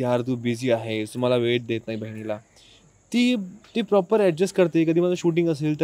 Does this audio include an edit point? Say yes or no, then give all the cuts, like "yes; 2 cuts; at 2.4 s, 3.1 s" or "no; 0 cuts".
no; 0 cuts